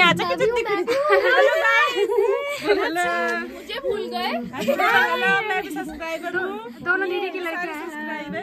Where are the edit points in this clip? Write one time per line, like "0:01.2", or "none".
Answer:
none